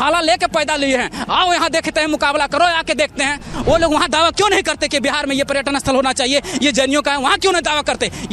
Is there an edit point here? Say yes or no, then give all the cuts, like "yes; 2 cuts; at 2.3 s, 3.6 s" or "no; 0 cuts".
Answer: yes; 1 cut; at 3.5 s